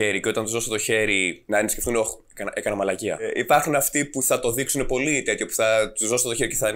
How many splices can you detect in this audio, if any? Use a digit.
2